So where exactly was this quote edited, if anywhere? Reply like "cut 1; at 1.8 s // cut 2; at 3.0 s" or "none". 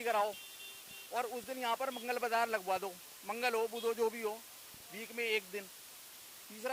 none